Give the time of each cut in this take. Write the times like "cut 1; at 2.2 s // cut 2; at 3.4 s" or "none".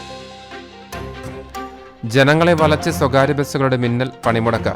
cut 1; at 1.2 s

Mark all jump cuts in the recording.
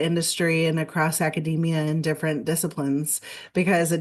none

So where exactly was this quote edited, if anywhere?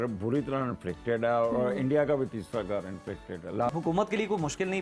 cut 1; at 3.7 s

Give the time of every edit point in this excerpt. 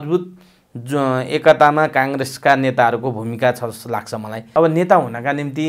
cut 1; at 4.4 s

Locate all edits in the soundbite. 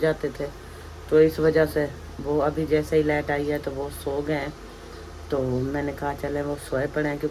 none

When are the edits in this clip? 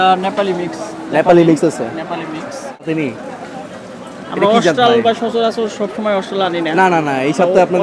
cut 1; at 2.8 s

